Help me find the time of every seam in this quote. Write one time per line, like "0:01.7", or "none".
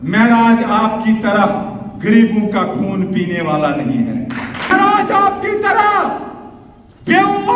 0:04.7